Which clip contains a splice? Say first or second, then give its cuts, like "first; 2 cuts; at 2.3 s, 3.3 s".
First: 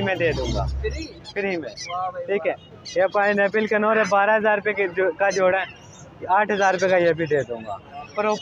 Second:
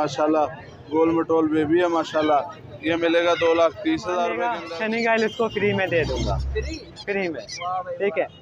second; 1 cut; at 4.5 s